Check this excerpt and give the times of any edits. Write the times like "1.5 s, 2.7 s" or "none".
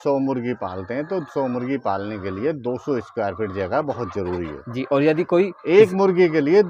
none